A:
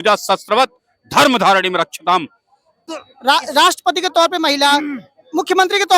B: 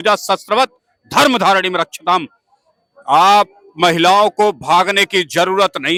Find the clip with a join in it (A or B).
A